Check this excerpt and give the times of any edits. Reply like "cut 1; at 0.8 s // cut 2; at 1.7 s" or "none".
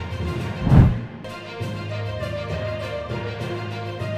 none